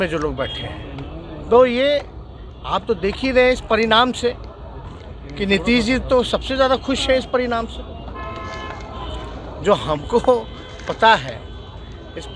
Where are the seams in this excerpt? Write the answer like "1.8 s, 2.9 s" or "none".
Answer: none